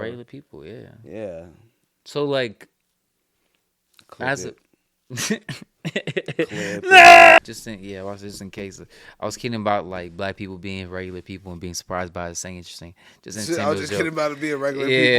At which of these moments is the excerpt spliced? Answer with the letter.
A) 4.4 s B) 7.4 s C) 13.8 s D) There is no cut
B